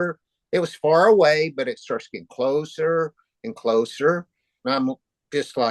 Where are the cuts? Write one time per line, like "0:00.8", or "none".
0:04.6